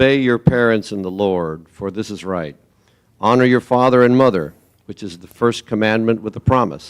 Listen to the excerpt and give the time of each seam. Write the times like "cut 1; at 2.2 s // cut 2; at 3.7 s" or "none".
none